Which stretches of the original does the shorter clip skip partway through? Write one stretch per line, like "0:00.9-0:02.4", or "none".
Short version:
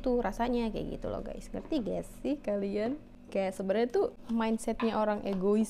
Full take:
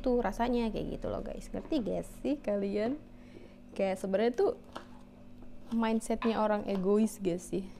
0:03.1-0:03.6
0:04.6-0:05.6